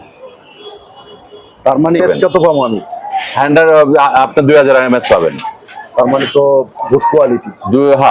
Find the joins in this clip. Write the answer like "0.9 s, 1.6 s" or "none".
2.0 s